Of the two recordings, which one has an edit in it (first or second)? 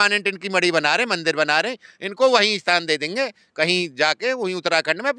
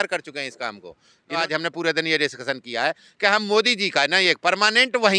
second